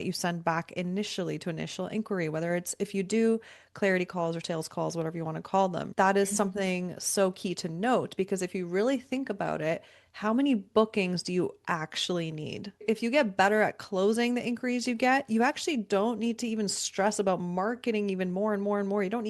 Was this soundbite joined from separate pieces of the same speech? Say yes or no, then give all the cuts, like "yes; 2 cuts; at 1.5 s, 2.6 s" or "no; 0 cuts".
yes; 2 cuts; at 5.9 s, 12.8 s